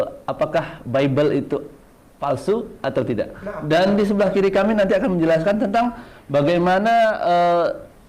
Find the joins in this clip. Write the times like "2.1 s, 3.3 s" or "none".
none